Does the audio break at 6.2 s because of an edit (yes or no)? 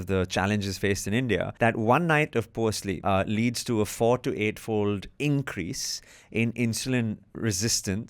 no